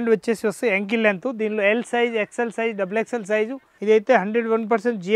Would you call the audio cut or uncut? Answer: cut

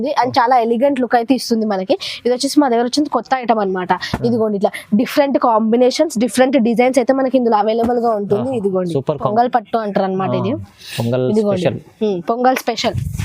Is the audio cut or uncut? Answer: cut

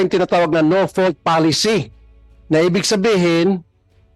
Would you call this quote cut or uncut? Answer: uncut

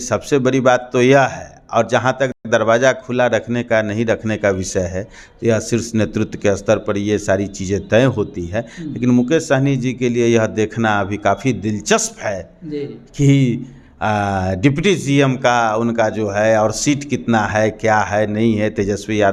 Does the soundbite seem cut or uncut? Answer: uncut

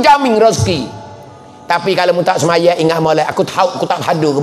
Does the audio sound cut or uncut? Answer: uncut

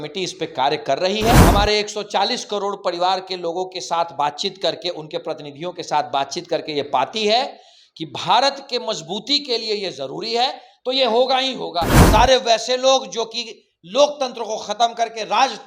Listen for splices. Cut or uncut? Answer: cut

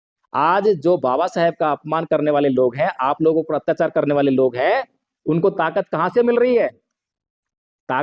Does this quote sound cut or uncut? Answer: uncut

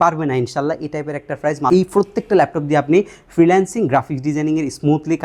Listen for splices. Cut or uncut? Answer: cut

